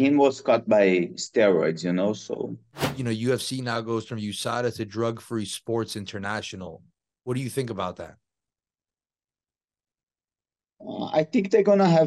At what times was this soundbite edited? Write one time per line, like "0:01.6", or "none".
0:02.9

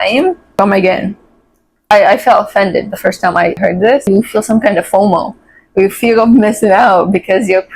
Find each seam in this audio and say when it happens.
0:01.9
0:03.7

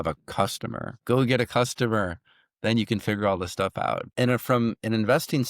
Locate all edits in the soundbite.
0:01.0
0:04.1

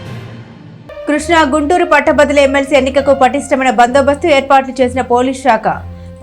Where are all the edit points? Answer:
0:01.0

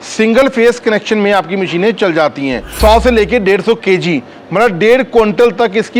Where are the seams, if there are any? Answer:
0:02.7

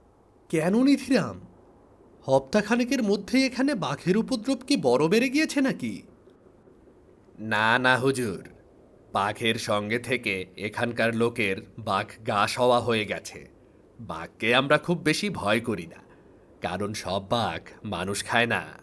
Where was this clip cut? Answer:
none

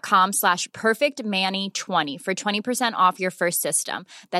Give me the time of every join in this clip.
0:02.1

